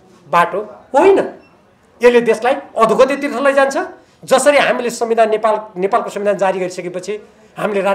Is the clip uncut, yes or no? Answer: yes